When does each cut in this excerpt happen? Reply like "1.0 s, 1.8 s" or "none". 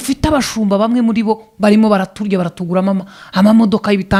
none